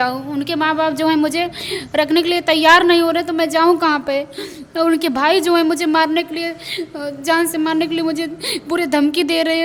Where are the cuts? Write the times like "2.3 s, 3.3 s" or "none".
none